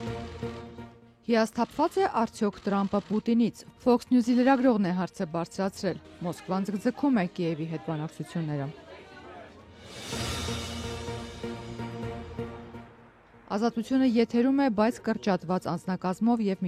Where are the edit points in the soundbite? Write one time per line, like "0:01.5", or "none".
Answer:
0:01.1